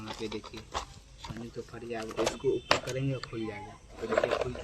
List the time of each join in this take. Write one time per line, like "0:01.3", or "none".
0:02.1